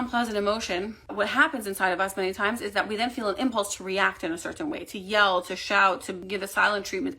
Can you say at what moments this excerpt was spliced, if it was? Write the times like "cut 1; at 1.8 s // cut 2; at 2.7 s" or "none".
cut 1; at 1.0 s // cut 2; at 6.2 s